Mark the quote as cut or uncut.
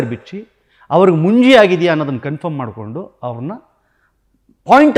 uncut